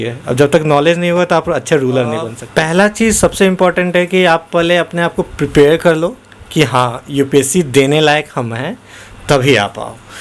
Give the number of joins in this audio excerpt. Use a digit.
1